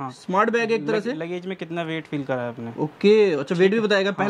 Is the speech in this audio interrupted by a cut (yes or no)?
no